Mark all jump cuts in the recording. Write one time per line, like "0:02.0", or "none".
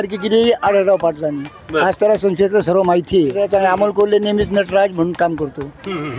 0:03.4